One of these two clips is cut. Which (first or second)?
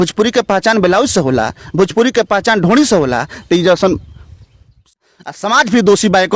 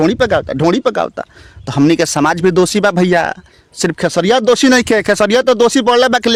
first